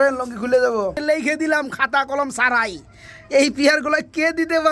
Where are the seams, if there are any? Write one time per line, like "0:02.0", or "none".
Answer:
0:01.0